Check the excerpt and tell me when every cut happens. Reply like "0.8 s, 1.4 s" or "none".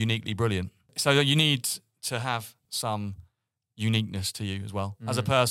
0.9 s, 2.7 s